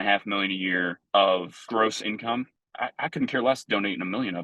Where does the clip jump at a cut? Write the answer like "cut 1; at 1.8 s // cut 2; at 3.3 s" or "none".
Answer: cut 1; at 1.0 s // cut 2; at 1.6 s // cut 3; at 2.6 s